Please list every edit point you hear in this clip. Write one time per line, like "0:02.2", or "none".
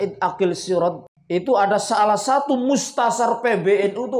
0:01.1